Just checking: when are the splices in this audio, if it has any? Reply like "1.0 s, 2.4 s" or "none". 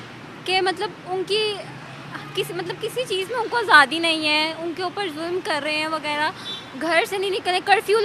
none